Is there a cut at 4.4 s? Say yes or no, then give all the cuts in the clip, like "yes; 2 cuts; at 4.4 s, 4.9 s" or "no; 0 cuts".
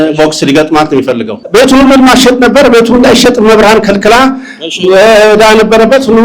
no; 1 cut; at 1.3 s